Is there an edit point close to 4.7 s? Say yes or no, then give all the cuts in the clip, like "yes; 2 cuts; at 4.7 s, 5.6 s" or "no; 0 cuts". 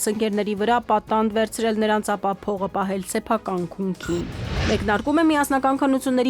yes; 1 cut; at 4.7 s